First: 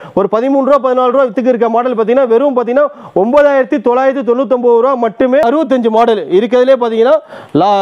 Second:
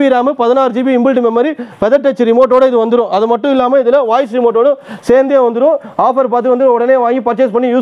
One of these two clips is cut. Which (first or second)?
first